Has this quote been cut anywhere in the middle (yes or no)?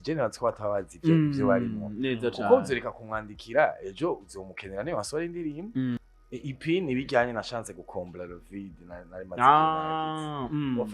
yes